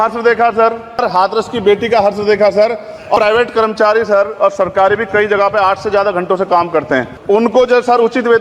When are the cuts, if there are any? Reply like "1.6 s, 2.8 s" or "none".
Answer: 1.0 s, 3.2 s, 7.1 s